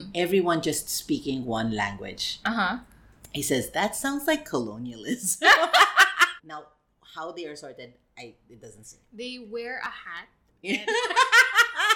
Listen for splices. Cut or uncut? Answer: cut